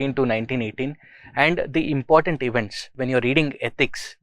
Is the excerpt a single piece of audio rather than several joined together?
no; 1 cut; at 3.0 s

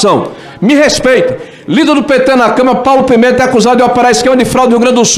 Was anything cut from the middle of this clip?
no; 0 cuts

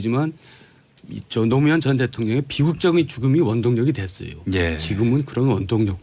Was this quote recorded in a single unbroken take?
no; 1 cut; at 2.0 s

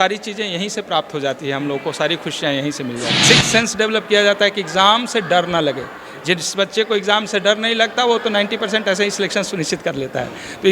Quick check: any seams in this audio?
yes; 1 cut; at 3.1 s

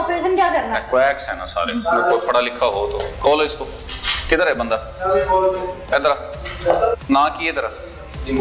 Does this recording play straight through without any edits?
yes; 0 cuts

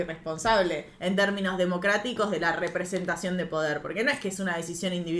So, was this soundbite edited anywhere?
no; 0 cuts

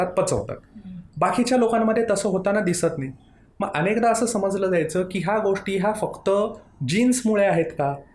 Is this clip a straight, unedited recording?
yes; 0 cuts

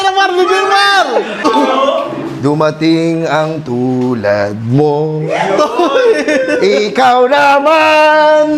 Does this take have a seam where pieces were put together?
yes; 1 cut; at 1.4 s

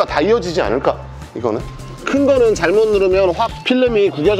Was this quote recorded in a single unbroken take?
no; 1 cut; at 2.0 s

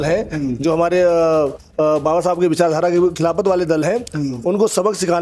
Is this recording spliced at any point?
no; 0 cuts

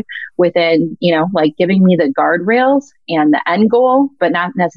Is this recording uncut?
yes; 0 cuts

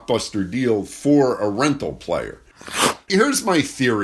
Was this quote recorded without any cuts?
no; 1 cut; at 2.7 s

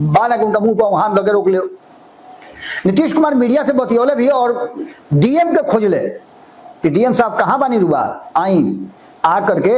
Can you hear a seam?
no; 0 cuts

